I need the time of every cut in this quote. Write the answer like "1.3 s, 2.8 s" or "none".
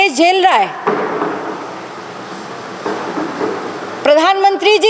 none